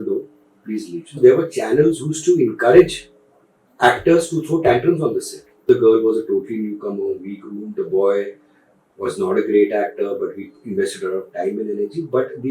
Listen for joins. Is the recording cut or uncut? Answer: cut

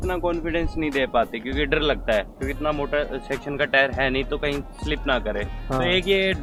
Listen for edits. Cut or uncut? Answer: uncut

